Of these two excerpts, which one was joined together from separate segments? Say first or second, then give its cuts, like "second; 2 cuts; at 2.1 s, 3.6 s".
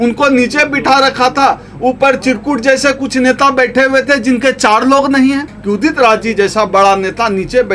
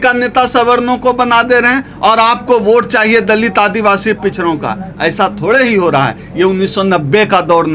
first; 1 cut; at 5.5 s